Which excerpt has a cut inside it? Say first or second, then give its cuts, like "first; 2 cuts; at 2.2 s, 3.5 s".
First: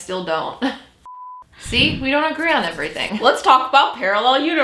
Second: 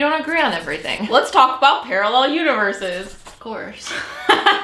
first; 1 cut; at 1.1 s